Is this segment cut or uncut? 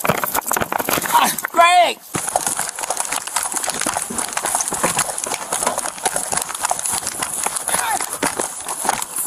cut